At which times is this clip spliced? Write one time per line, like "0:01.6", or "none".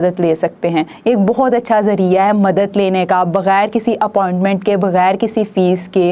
0:00.9

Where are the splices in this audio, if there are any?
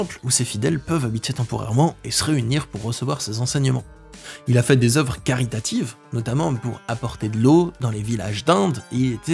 none

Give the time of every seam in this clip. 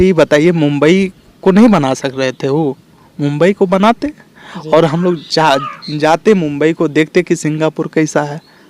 none

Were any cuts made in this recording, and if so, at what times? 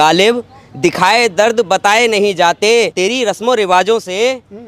0:02.9

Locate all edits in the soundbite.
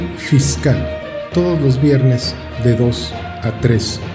0:01.0

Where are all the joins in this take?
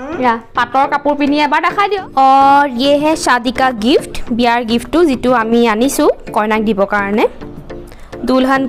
0:01.9

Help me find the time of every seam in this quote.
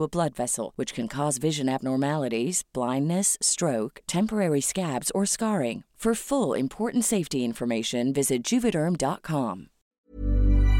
0:09.8

